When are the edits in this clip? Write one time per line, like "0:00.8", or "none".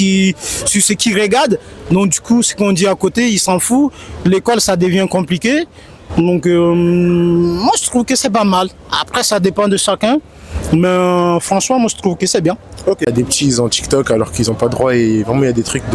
0:13.1

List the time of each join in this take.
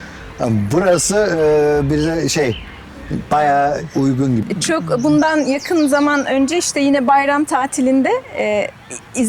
0:04.4

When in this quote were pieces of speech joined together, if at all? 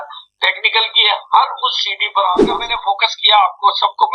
0:02.4

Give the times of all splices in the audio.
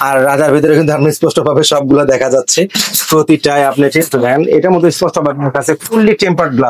none

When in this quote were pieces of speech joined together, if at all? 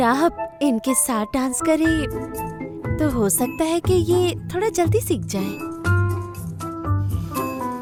none

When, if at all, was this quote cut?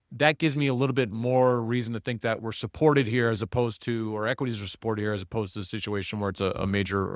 none

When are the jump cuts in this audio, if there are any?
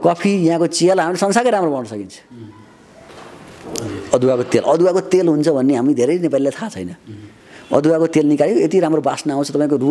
0:03.1

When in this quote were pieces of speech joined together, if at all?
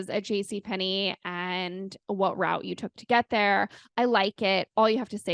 none

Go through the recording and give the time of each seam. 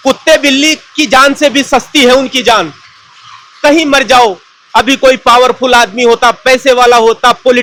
none

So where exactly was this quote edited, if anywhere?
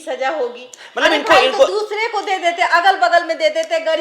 none

